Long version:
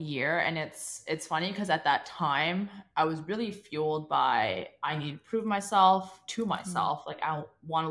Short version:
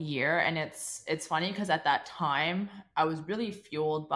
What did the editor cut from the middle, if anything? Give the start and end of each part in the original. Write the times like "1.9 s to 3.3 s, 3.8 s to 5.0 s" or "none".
none